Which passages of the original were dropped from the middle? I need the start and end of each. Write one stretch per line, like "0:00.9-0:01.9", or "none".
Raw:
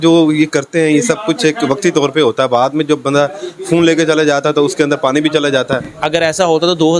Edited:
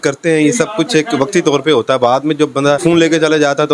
0:03.3-0:03.7